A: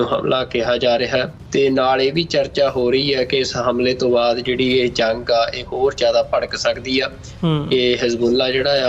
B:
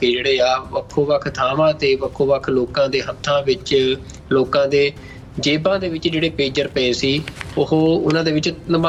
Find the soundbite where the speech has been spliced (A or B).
A